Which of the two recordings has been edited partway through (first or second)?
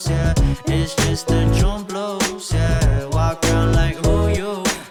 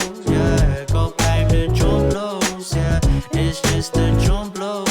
second